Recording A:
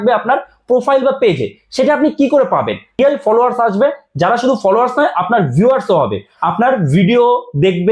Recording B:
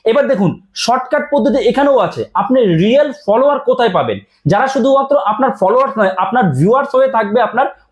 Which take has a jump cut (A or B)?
A